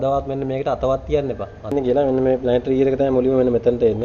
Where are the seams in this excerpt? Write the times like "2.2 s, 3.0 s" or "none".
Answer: 1.7 s